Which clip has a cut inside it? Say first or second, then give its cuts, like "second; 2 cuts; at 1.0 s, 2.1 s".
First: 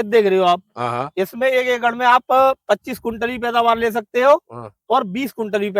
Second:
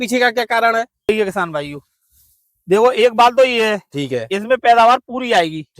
second; 1 cut; at 1.1 s